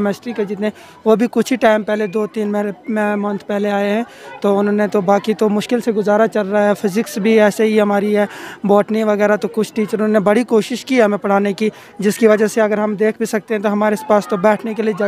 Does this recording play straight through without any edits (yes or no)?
yes